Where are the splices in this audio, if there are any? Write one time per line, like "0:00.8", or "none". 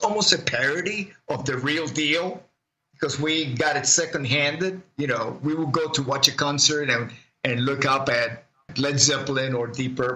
0:08.7